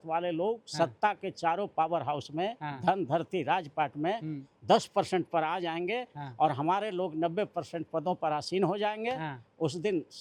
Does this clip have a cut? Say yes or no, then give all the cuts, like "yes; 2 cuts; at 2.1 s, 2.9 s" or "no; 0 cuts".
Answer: no; 0 cuts